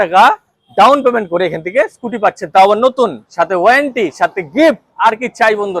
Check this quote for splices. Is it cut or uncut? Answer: uncut